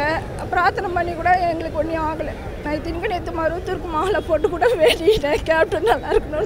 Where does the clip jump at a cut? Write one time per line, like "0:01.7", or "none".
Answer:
none